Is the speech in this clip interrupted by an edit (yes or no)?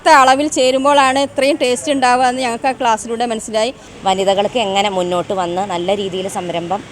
yes